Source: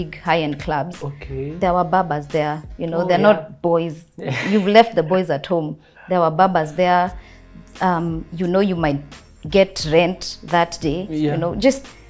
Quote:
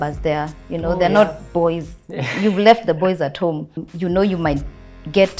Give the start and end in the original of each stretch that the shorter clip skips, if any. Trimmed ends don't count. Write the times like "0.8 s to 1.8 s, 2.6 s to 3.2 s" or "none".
5.9 s to 8.2 s